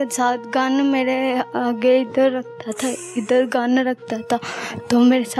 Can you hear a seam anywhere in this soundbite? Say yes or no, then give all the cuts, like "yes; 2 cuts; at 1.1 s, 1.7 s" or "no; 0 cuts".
no; 0 cuts